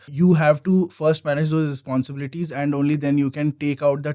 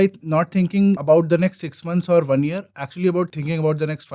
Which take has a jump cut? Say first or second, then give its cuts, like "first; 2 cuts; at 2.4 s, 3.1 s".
second; 2 cuts; at 1.0 s, 3.3 s